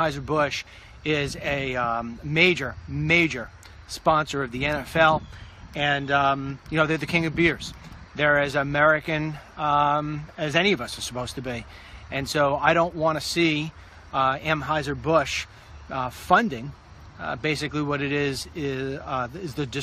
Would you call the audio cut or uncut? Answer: cut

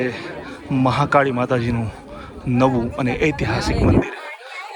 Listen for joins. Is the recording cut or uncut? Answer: uncut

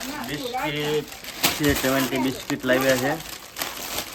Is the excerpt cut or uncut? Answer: uncut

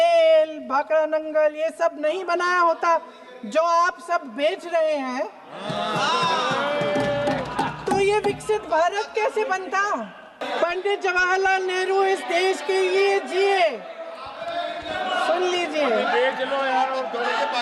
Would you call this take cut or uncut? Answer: cut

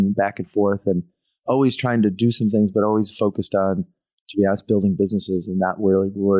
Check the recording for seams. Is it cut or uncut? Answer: uncut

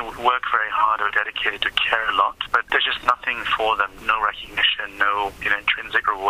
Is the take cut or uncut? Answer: cut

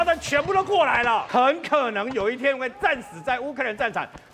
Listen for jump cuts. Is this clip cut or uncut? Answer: cut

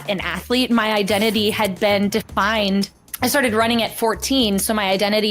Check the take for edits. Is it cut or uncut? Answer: uncut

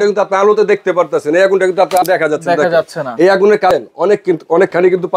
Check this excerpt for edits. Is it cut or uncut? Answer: cut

